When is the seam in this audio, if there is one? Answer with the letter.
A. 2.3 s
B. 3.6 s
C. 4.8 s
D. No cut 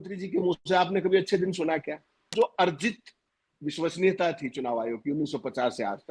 A